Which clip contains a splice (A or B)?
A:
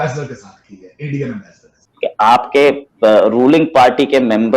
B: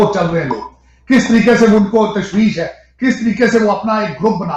A